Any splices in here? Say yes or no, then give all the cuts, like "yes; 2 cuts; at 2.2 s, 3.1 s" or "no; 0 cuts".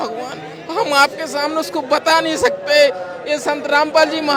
no; 0 cuts